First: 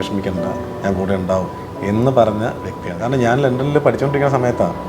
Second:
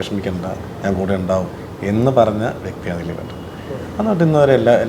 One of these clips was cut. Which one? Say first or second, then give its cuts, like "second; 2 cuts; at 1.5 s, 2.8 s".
first; 1 cut; at 3.0 s